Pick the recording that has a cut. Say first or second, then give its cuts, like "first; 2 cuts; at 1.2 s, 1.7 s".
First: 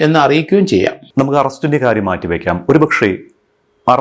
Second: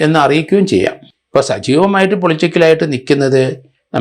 second; 1 cut; at 1.0 s